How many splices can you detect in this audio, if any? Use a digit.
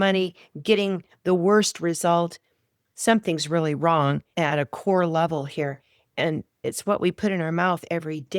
2